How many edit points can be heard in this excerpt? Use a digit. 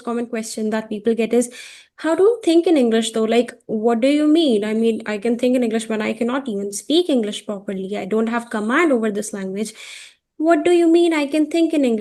0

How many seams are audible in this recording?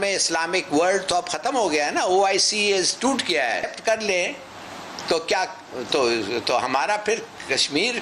1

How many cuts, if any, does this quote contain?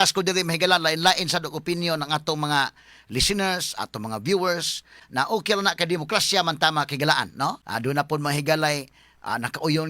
2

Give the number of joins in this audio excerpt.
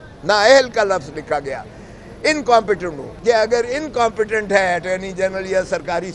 1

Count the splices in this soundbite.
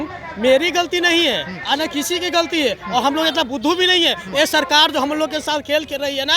0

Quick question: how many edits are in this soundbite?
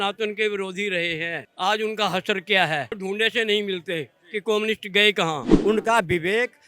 2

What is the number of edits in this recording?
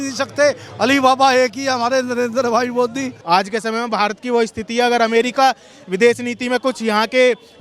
1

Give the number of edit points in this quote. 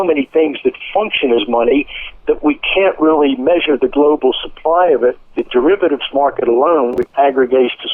2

